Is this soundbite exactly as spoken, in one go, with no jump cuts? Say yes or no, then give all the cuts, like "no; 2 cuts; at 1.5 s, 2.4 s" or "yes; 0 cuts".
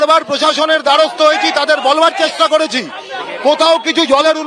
yes; 0 cuts